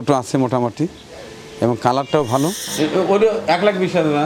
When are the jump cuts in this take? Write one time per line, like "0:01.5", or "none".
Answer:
0:02.7

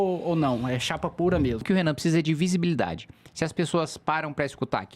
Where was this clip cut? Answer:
0:01.6

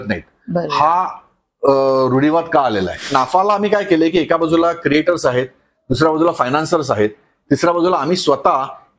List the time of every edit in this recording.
0:03.1

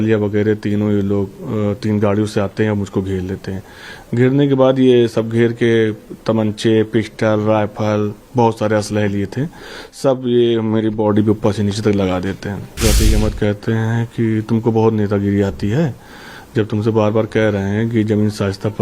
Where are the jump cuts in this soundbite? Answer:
0:12.8

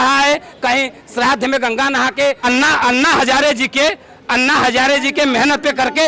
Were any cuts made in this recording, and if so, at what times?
0:02.4

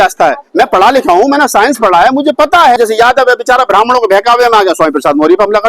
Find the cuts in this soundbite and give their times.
0:02.8

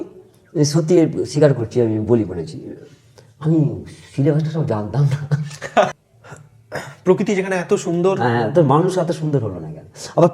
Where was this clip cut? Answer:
0:05.9

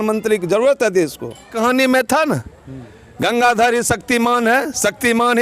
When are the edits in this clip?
0:01.5

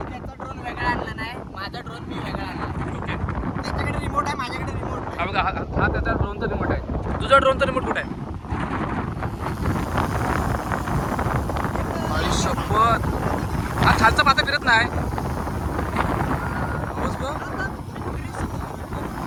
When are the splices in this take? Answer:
none

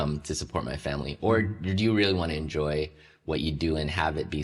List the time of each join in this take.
none

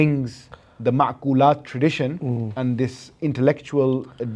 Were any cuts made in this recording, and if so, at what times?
none

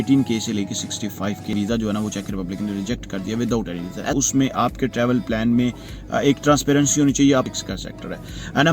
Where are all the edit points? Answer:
0:01.5
0:04.1
0:07.5

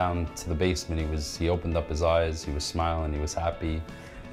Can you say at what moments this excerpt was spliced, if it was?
none

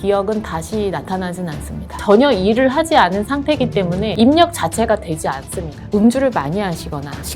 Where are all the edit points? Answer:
0:02.0
0:05.9

